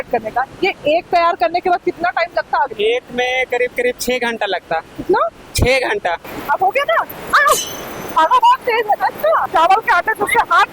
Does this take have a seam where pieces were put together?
yes; 3 cuts; at 2.7 s, 6.2 s, 9.5 s

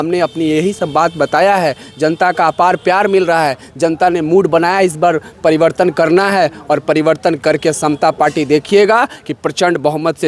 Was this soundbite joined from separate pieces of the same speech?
no; 0 cuts

